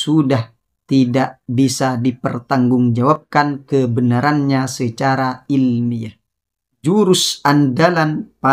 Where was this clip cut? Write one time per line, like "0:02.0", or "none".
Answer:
0:06.8

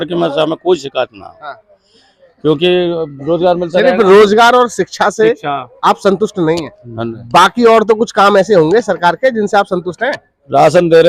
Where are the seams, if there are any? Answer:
none

